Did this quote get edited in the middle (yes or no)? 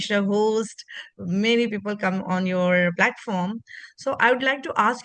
no